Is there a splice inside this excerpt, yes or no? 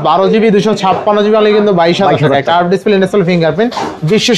no